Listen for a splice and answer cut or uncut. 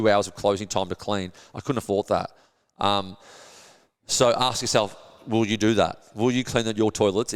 uncut